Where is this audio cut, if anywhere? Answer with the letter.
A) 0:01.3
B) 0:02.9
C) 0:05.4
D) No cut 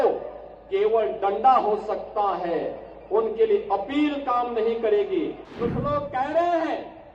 C